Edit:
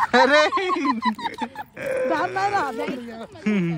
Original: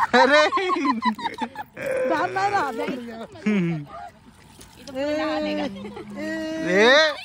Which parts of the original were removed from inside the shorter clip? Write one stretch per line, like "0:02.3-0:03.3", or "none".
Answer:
none